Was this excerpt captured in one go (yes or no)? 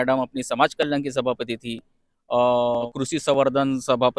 yes